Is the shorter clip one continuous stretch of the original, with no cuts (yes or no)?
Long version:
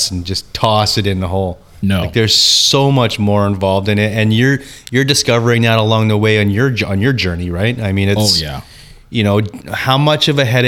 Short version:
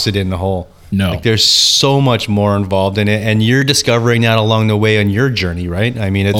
no